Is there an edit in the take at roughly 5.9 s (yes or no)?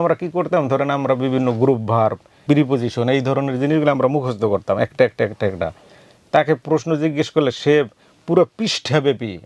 no